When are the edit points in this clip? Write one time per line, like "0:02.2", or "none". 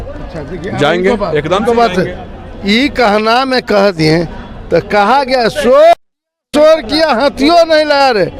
none